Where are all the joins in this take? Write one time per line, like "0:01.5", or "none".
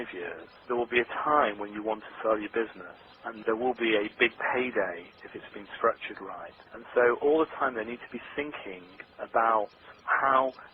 0:04.1